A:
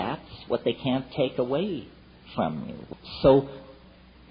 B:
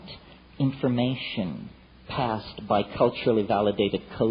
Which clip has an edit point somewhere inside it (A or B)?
A